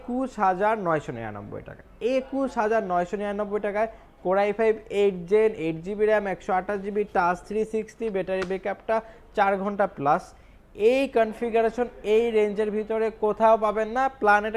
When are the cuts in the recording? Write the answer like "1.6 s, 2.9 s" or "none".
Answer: none